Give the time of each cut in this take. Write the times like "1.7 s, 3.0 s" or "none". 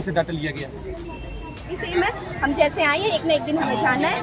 1.8 s